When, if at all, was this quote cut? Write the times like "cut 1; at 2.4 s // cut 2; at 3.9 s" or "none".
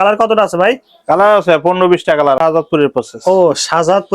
cut 1; at 2.4 s